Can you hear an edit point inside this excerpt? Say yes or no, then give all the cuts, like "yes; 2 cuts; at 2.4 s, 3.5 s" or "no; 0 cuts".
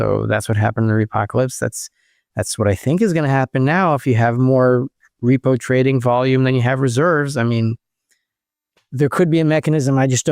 no; 0 cuts